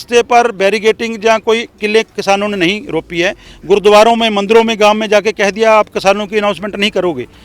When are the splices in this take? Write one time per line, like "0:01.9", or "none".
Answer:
0:03.5